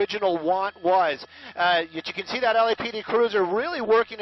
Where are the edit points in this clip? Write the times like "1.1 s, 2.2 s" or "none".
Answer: none